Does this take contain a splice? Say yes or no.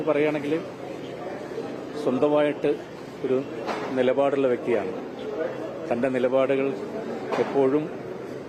no